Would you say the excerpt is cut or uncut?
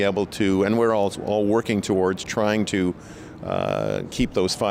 uncut